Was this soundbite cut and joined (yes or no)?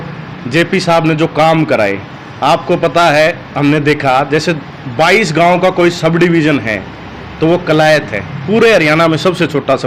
no